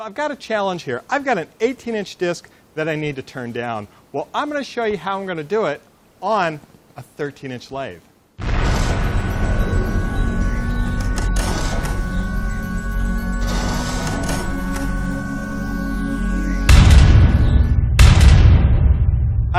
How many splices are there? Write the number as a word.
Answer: zero